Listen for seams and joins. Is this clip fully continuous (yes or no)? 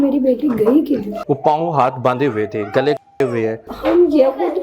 no